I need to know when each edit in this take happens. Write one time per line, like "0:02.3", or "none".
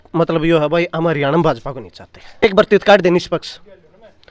0:02.4